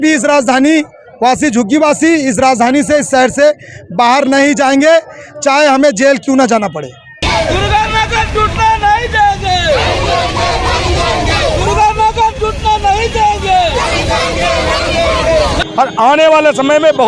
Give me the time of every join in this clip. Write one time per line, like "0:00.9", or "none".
0:07.2
0:15.6

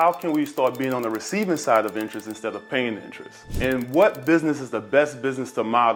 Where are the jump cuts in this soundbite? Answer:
none

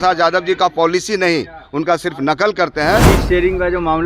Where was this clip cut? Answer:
0:03.0

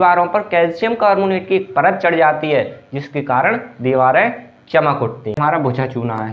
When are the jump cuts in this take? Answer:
0:05.4

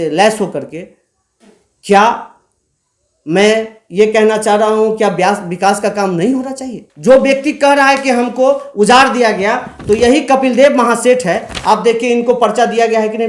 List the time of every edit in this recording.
0:06.8

